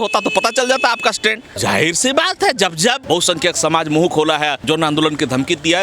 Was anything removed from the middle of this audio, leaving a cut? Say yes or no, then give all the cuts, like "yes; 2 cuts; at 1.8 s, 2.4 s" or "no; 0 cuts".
yes; 3 cuts; at 1.5 s, 3.0 s, 4.6 s